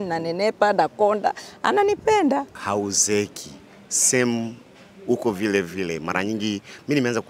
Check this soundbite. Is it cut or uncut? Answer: cut